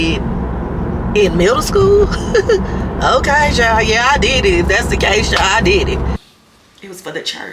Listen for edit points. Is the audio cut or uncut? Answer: cut